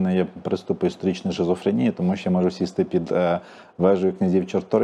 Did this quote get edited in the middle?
no; 0 cuts

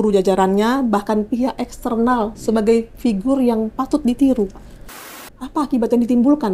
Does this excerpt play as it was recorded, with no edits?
no; 1 cut; at 5.1 s

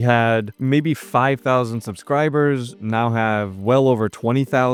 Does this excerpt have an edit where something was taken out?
no; 0 cuts

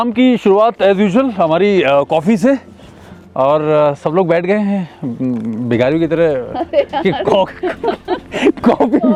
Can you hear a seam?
no; 0 cuts

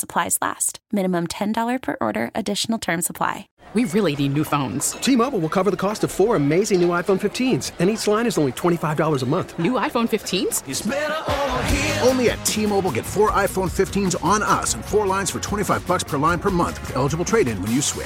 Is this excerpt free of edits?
no; 1 cut; at 3.5 s

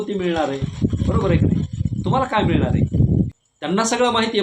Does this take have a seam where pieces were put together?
yes; 1 cut; at 3.4 s

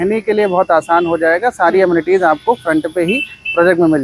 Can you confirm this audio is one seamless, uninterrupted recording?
yes; 0 cuts

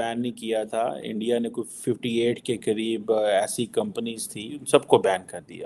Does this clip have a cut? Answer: yes; 1 cut; at 4.6 s

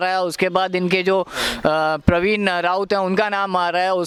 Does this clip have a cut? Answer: no; 0 cuts

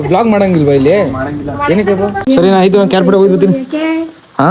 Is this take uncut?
no; 1 cut; at 2.2 s

